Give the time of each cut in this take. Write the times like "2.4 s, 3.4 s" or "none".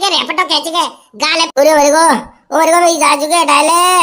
1.5 s